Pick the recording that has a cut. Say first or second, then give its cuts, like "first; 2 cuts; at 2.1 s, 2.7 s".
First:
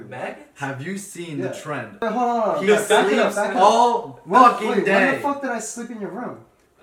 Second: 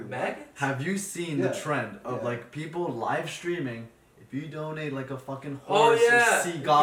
first; 1 cut; at 2.0 s